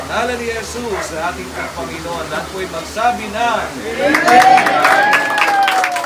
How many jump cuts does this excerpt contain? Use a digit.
0